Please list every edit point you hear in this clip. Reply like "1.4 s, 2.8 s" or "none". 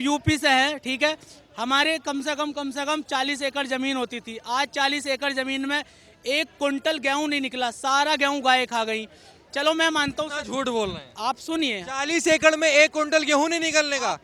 none